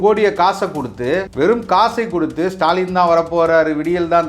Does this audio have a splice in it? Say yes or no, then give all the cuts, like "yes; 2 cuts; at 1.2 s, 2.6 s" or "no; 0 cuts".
yes; 1 cut; at 1.3 s